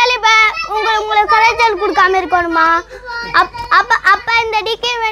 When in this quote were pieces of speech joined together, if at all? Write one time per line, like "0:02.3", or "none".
none